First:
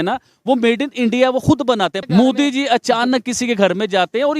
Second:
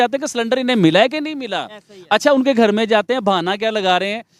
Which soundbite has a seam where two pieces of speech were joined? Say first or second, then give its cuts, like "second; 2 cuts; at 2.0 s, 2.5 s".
first; 1 cut; at 2.0 s